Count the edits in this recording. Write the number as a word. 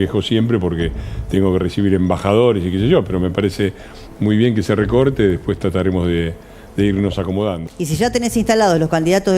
one